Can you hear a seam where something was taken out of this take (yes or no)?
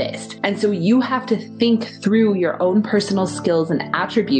no